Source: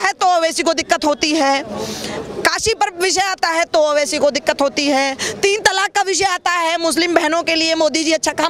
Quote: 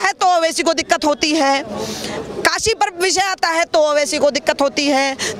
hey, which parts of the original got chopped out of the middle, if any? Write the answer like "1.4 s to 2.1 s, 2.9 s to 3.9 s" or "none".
none